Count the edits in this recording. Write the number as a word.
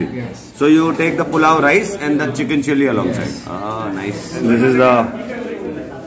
one